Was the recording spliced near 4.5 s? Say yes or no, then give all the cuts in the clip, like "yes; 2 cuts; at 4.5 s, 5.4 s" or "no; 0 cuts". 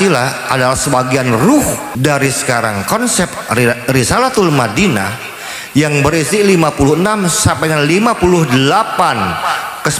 no; 1 cut; at 1.9 s